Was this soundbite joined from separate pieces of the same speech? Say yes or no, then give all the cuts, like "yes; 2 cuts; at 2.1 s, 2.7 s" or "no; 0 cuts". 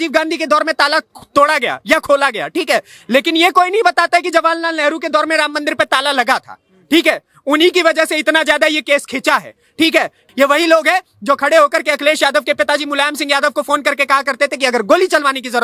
yes; 1 cut; at 10.2 s